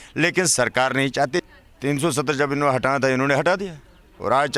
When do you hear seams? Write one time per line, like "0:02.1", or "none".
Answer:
0:01.4